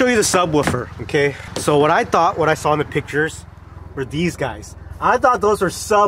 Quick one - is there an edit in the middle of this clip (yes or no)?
yes